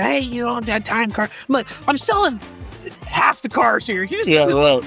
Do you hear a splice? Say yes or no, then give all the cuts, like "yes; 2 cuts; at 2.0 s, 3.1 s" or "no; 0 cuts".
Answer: no; 0 cuts